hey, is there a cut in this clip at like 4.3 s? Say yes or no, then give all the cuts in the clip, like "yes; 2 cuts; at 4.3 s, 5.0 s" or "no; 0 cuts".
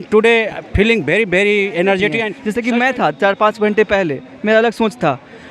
no; 1 cut; at 2.4 s